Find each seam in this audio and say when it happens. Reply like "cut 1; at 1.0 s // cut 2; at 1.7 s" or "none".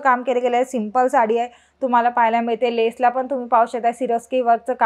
none